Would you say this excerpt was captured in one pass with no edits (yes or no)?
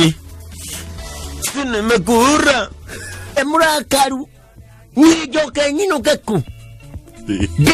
no